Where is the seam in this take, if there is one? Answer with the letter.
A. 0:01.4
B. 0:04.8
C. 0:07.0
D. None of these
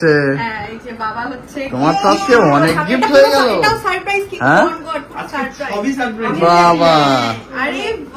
D